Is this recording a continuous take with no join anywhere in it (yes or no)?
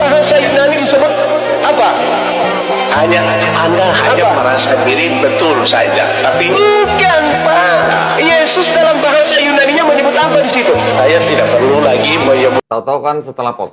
no